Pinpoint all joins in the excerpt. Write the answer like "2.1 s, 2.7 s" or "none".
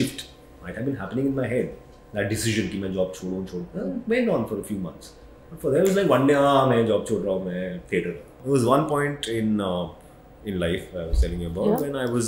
8.3 s